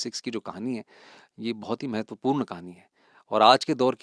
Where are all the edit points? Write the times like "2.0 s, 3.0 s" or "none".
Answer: none